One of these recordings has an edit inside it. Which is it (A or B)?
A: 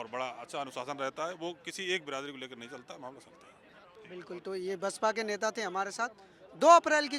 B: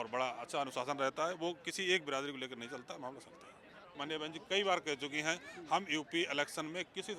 B